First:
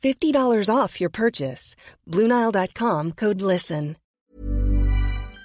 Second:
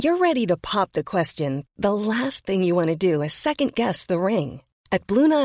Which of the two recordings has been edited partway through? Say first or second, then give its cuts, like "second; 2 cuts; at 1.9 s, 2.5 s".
first; 1 cut; at 4.0 s